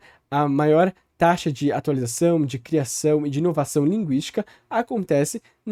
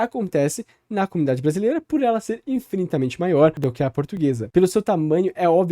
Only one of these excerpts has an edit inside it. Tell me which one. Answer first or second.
second